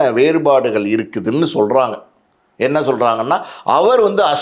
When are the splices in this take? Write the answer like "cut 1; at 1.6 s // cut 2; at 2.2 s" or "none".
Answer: none